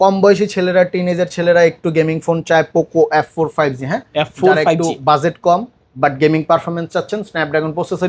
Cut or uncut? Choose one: uncut